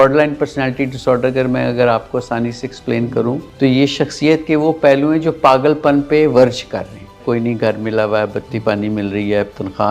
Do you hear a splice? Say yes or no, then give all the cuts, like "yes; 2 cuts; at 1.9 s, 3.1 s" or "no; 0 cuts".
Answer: yes; 2 cuts; at 3.5 s, 7.2 s